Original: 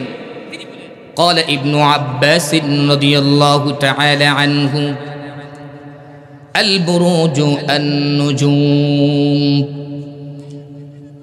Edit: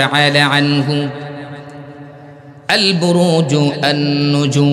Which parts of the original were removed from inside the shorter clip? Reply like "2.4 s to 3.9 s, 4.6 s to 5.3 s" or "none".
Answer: none